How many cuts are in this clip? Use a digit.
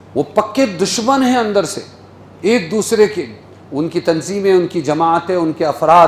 0